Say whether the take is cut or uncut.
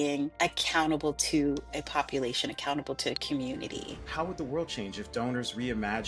cut